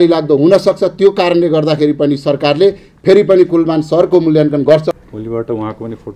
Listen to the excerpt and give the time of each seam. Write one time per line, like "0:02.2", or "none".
0:04.9